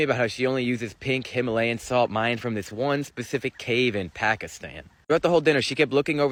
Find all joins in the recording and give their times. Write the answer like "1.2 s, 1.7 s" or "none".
none